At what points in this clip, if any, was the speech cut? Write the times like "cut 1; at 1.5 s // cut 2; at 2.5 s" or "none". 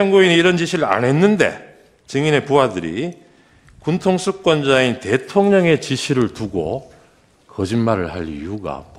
none